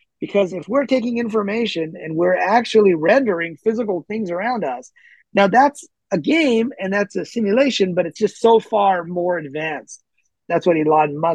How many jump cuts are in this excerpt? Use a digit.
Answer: 2